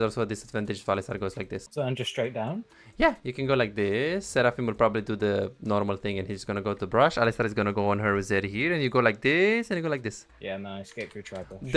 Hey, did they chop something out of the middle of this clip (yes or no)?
yes